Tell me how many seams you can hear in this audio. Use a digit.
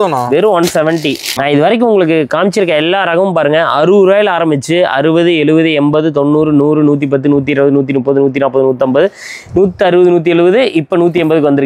1